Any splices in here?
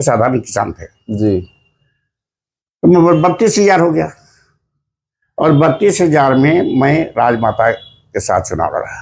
no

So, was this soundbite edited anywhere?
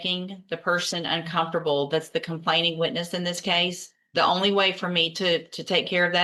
no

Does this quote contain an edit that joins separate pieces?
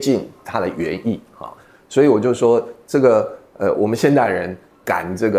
no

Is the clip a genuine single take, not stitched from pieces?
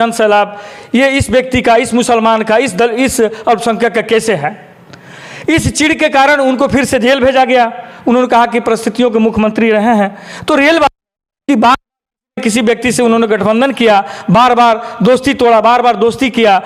yes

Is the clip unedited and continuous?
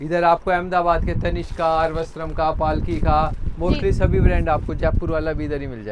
yes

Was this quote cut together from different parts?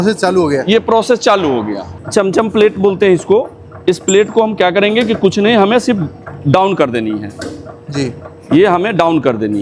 yes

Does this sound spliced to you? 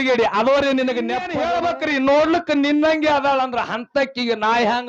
yes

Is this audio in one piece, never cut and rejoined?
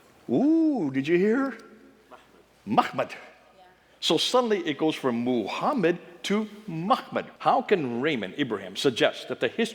no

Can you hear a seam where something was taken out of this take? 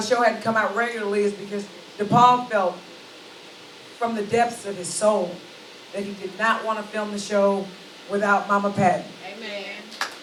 no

